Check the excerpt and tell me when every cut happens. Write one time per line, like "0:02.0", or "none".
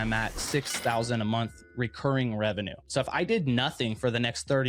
0:02.7